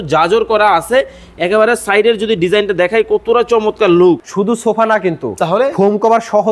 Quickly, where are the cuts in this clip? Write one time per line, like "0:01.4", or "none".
0:04.3